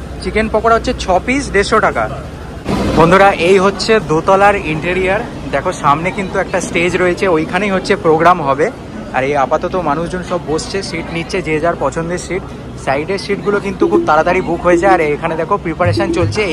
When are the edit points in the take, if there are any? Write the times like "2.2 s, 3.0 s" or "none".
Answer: 2.5 s